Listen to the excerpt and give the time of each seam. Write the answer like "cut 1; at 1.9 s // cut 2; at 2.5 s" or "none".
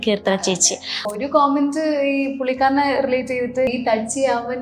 cut 1; at 1.1 s // cut 2; at 3.7 s

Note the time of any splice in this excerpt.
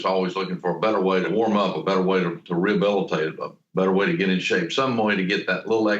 cut 1; at 1.3 s

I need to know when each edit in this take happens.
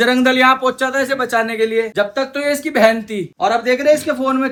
none

